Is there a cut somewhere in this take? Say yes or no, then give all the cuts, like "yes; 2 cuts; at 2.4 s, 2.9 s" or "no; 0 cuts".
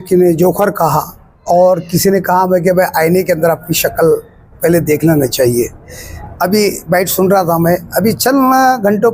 no; 0 cuts